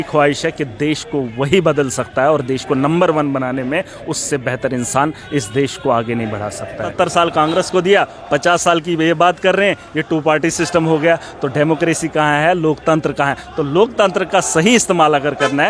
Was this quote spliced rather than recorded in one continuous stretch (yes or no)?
yes